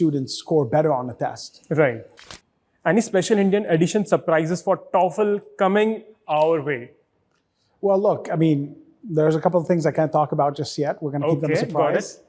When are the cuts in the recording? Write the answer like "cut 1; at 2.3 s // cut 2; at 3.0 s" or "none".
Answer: cut 1; at 2.1 s

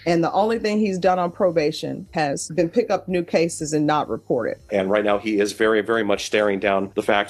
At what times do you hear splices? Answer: cut 1; at 2.1 s // cut 2; at 4.6 s

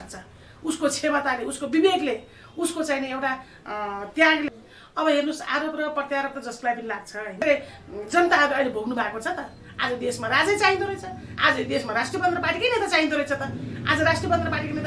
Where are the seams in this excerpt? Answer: cut 1; at 4.5 s // cut 2; at 7.4 s

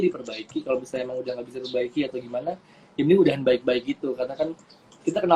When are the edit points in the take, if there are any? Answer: none

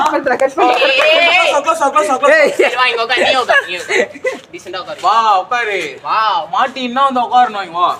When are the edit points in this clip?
none

